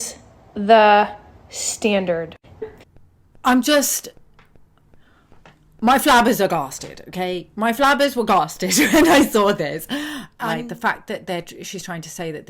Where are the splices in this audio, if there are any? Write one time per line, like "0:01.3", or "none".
0:02.6
0:10.2